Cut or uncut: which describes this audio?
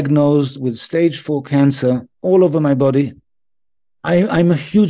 cut